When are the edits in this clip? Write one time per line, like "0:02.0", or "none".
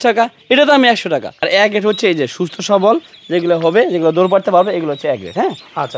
0:01.4